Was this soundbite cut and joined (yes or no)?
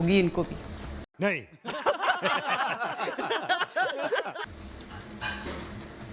no